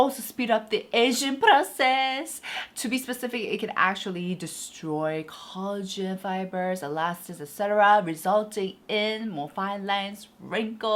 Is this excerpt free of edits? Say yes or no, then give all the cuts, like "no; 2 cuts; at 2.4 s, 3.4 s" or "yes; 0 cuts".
yes; 0 cuts